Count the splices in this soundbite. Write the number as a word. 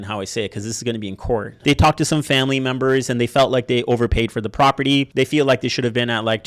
one